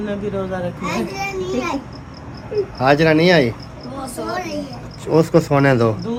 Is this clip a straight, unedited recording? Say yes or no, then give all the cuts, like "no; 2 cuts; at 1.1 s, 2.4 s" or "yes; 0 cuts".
yes; 0 cuts